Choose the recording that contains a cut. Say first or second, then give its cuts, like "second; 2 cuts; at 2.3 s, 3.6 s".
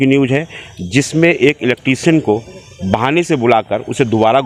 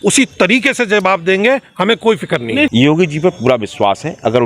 second; 1 cut; at 2.7 s